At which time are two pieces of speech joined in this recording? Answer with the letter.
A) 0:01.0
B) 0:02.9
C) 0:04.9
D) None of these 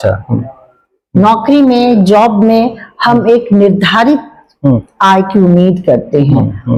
D